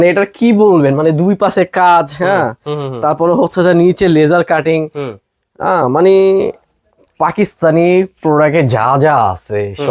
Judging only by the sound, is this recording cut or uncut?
uncut